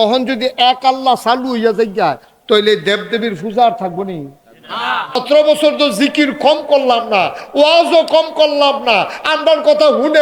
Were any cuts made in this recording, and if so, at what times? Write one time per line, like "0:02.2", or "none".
0:05.2